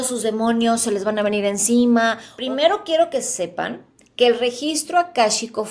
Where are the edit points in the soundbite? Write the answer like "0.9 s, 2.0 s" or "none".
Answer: 2.3 s